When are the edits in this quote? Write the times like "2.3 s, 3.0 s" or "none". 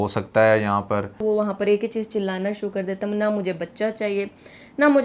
1.2 s